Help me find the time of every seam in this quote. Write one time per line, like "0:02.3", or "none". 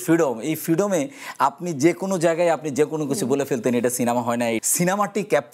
0:04.6